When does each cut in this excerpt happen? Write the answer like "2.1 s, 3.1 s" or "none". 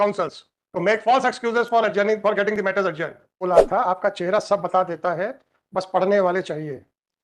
3.4 s